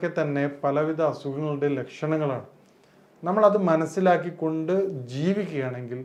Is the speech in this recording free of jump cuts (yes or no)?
yes